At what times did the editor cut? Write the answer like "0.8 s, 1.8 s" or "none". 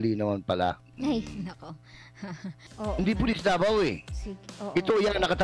2.6 s